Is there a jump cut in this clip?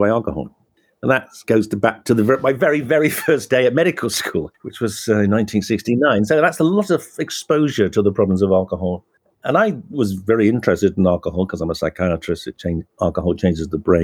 no; 0 cuts

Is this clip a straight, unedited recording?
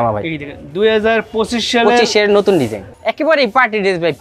no; 1 cut; at 3.0 s

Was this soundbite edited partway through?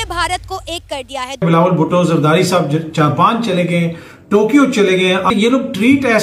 yes; 2 cuts; at 1.5 s, 5.3 s

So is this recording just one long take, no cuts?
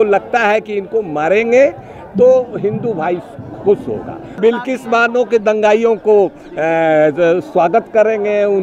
no; 1 cut; at 4.4 s

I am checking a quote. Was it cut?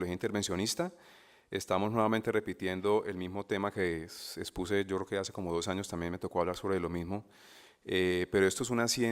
yes; 1 cut; at 6.2 s

